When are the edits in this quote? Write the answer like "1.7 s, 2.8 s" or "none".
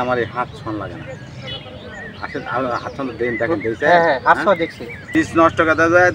5.1 s